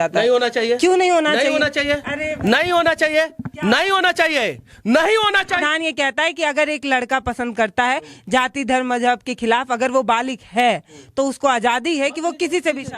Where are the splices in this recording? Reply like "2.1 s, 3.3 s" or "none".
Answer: 5.6 s